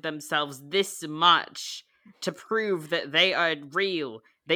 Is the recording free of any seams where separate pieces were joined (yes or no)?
yes